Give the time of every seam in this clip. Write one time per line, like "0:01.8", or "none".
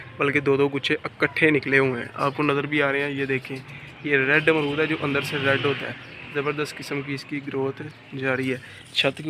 none